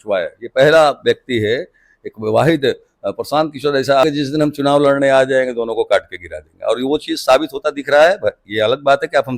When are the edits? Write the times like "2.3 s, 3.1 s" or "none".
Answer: 4.0 s